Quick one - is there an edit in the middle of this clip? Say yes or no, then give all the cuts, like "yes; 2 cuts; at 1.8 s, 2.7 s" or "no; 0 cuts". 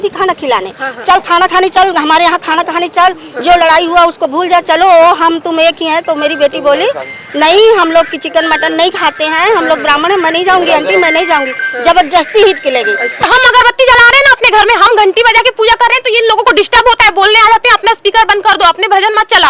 yes; 1 cut; at 13.3 s